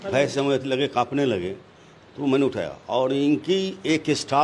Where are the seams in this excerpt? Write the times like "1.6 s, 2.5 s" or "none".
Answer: none

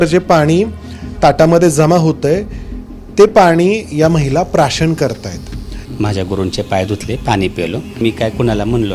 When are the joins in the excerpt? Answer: 5.8 s, 8.0 s

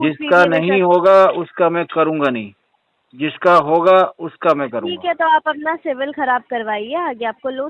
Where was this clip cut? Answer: none

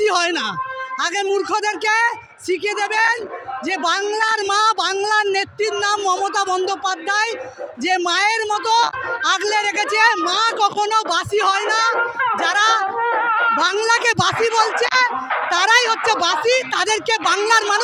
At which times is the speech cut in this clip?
none

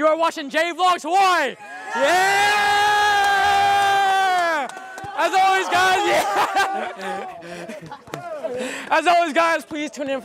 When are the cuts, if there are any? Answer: none

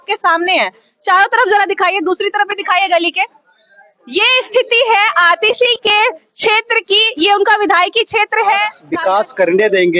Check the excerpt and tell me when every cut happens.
8.8 s

